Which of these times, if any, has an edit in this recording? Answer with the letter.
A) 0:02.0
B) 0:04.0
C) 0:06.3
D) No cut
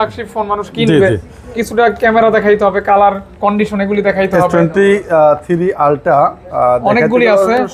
D